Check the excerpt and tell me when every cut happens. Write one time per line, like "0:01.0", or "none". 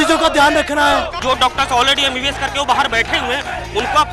0:01.2